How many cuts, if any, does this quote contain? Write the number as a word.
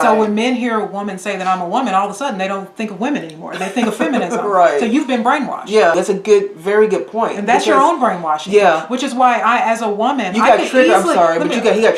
one